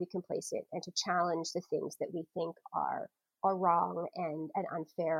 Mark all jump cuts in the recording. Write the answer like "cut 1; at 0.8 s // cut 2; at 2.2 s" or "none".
none